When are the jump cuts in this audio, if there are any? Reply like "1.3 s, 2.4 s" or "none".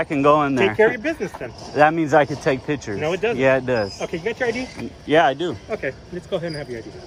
none